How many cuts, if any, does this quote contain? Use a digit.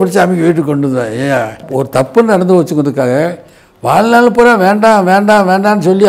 1